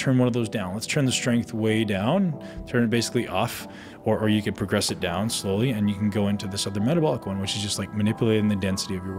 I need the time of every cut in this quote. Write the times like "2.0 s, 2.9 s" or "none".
none